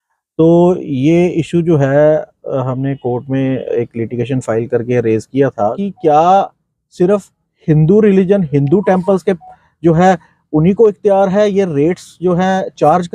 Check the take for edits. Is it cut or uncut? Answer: cut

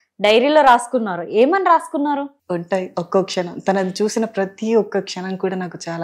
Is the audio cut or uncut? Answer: uncut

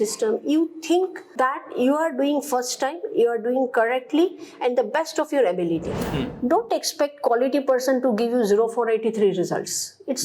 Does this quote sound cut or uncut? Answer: cut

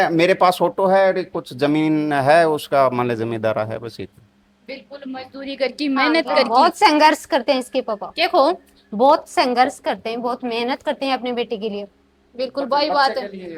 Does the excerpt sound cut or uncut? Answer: uncut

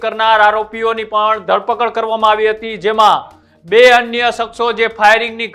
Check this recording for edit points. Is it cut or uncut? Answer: uncut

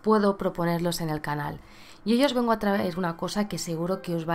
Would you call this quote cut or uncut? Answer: cut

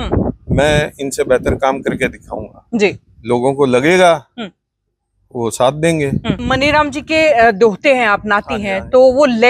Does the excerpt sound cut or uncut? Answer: cut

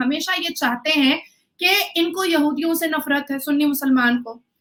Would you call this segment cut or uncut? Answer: uncut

